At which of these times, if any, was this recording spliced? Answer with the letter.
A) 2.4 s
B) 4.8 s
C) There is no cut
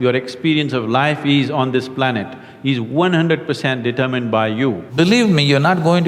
B